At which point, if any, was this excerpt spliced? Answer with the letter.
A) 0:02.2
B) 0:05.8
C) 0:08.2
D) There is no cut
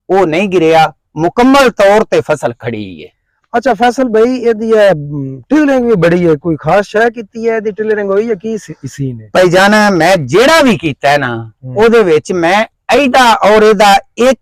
D